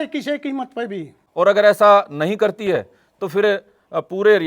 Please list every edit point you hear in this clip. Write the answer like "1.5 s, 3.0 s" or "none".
1.2 s